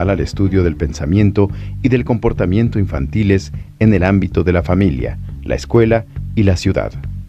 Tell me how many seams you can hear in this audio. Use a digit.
0